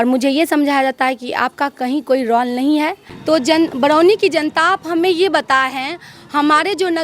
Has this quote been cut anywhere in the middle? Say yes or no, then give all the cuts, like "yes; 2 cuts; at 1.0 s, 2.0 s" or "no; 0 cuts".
yes; 1 cut; at 3.1 s